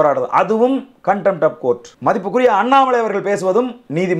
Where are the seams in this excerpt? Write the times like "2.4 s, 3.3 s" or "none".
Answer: 1.9 s